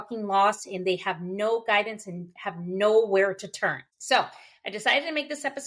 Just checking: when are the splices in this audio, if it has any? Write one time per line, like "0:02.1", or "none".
0:03.9